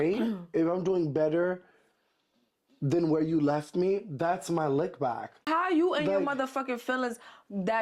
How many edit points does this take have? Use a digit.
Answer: 1